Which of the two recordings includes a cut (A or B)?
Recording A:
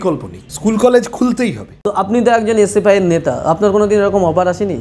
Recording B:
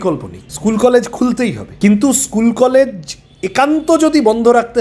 A